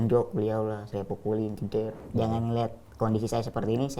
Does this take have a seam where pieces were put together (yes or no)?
yes